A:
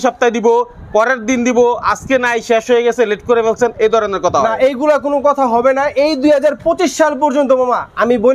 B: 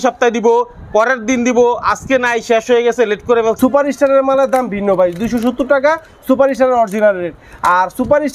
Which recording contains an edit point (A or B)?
B